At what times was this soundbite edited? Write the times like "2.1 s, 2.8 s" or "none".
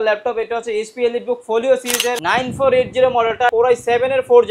2.2 s, 3.5 s